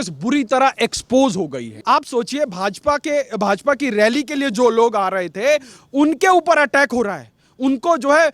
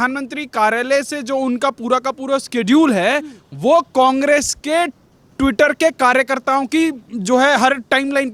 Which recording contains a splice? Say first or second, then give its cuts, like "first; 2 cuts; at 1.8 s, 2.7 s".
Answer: first; 1 cut; at 1.7 s